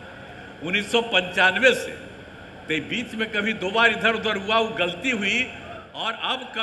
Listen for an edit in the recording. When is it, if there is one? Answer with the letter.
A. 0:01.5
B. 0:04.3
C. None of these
C